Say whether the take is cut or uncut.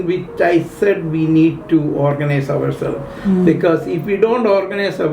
uncut